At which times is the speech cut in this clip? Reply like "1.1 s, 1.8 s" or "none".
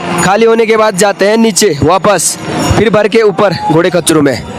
none